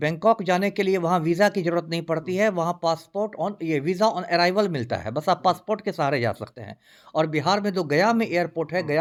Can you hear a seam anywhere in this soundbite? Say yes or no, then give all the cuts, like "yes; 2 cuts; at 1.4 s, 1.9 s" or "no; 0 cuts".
no; 0 cuts